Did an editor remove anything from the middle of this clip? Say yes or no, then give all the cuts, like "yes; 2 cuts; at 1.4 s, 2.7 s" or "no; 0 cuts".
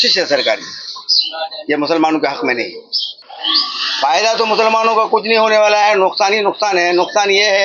no; 0 cuts